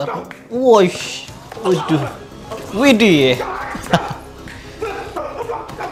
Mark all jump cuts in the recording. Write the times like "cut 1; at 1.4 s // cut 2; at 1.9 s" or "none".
none

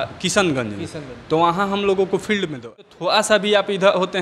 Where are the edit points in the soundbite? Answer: cut 1; at 2.9 s

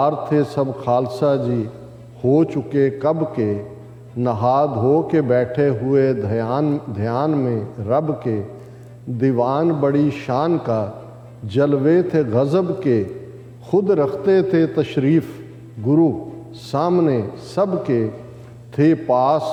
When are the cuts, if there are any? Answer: none

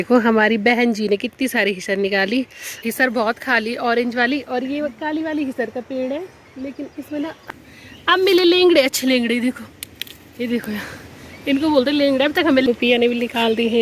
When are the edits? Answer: cut 1; at 2.6 s // cut 2; at 7.4 s // cut 3; at 12.6 s

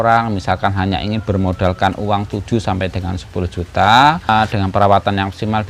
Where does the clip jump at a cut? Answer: cut 1; at 4.3 s

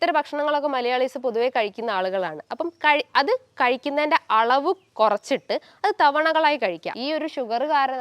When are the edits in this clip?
cut 1; at 6.9 s

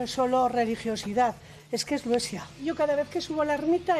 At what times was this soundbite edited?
cut 1; at 2.6 s

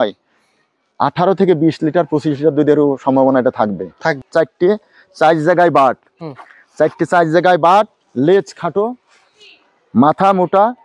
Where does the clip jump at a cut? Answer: cut 1; at 4.2 s

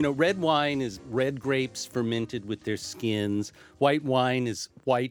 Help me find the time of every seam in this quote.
cut 1; at 1.0 s

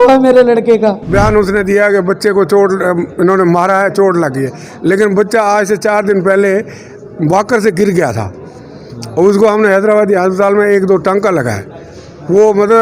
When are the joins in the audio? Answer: cut 1; at 1.0 s

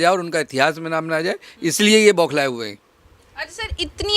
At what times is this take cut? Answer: none

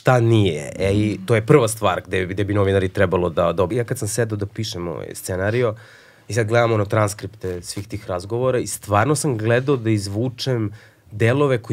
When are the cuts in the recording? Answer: cut 1; at 3.7 s

